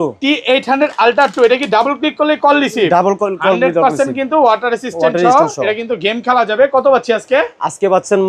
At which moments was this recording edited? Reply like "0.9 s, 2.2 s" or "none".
none